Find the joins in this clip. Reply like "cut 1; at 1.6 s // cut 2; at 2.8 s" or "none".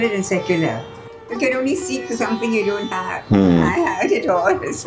cut 1; at 1.1 s